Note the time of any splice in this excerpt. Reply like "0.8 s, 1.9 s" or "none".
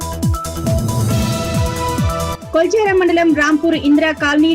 2.3 s